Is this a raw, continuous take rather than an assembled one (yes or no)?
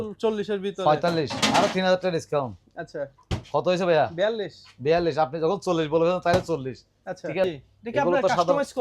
no